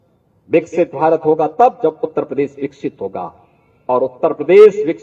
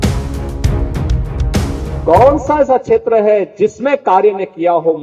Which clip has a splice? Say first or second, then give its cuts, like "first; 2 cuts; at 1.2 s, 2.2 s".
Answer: second; 1 cut; at 1.5 s